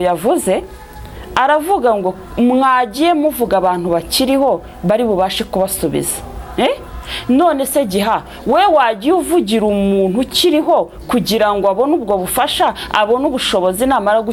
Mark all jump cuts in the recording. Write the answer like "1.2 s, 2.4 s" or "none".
none